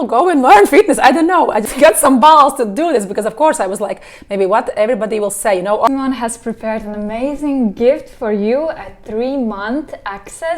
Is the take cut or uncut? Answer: cut